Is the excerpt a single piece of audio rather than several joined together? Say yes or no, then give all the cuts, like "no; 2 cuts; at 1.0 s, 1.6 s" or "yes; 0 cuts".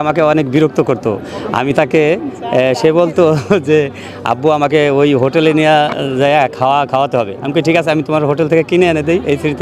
yes; 0 cuts